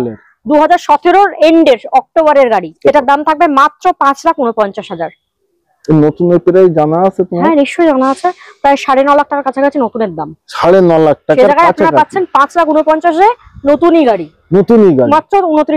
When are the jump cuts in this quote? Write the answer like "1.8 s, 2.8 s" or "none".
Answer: 2.8 s